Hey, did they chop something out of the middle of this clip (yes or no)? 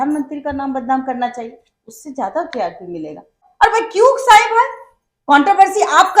yes